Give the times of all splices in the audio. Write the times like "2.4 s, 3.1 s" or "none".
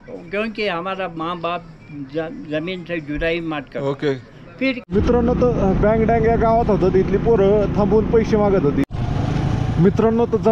4.8 s, 8.9 s